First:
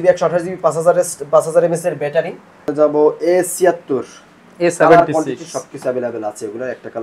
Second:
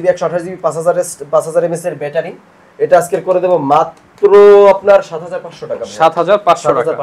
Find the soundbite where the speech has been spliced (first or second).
first